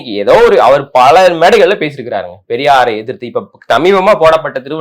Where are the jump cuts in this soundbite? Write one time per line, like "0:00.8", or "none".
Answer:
none